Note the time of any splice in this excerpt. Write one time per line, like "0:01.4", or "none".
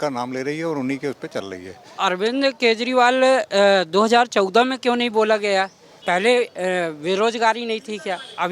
0:02.0
0:05.9

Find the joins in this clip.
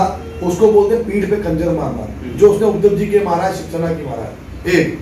none

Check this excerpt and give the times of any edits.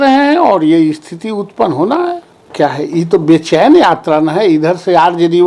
0:02.5

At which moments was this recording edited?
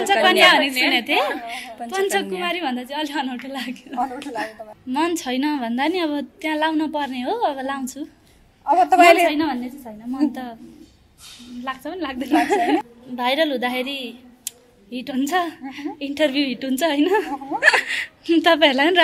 0:04.7
0:13.0

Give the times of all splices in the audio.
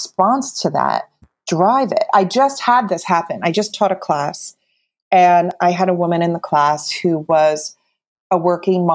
0:08.0

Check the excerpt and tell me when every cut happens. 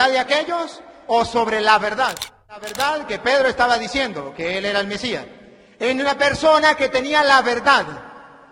0:02.7

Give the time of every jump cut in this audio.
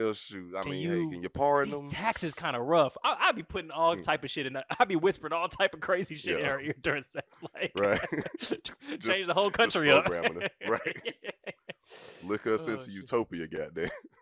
none

